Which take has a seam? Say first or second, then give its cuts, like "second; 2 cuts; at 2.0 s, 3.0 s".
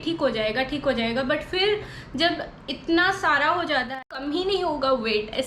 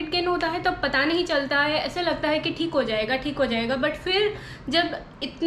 first; 1 cut; at 3.9 s